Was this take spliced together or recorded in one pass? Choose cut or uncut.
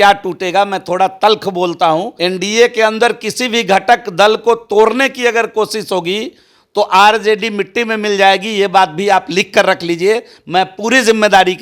cut